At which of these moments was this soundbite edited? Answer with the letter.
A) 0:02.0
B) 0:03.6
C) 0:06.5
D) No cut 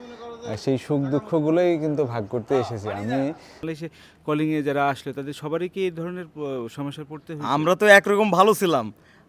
B